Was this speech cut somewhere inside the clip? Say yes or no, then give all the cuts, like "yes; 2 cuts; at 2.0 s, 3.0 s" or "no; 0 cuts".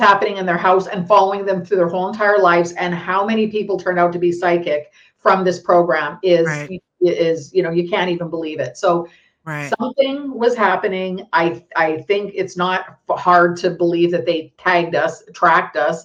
no; 0 cuts